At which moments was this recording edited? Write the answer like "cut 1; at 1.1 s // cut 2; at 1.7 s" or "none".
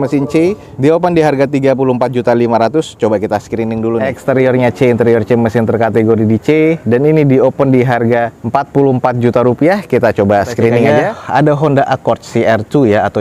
cut 1; at 4.1 s // cut 2; at 11.2 s